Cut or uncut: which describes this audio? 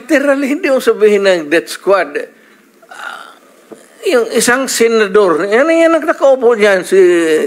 uncut